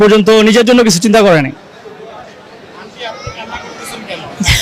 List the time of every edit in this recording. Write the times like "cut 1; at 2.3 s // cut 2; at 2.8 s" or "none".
none